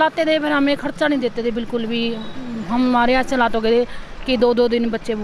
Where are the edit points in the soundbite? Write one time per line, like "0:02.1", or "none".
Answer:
none